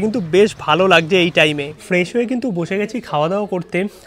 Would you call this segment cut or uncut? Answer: uncut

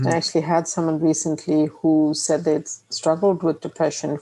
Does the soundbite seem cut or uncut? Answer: uncut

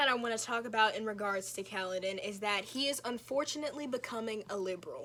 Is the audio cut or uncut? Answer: uncut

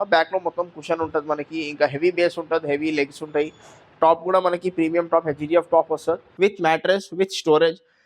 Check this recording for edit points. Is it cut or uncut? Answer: cut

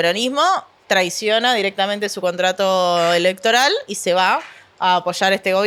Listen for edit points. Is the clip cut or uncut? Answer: uncut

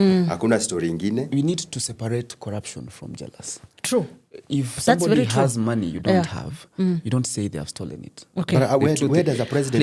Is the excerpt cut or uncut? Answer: cut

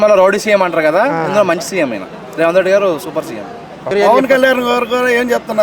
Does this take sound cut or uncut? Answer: cut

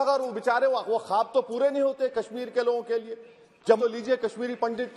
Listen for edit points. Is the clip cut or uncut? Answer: cut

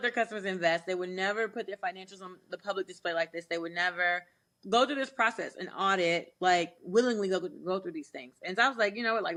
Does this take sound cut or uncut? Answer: uncut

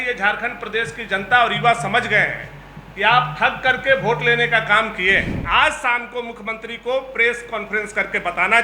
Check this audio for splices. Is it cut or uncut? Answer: cut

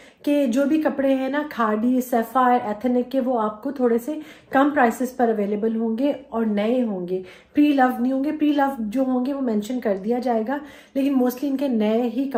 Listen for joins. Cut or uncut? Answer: uncut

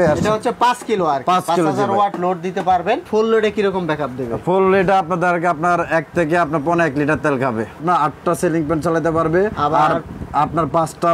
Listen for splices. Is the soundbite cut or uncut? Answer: cut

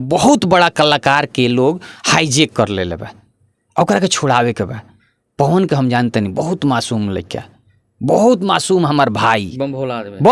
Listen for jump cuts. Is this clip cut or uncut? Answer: uncut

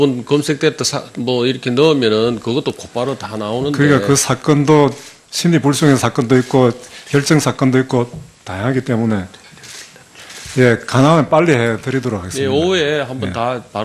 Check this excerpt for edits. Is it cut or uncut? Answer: uncut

